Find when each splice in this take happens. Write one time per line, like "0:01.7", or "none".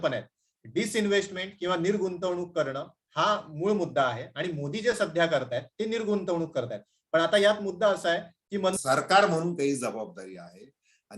0:08.7